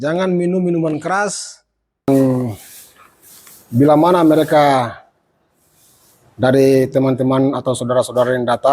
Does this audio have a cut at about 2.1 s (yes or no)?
yes